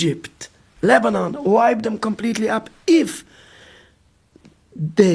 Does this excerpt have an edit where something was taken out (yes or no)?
no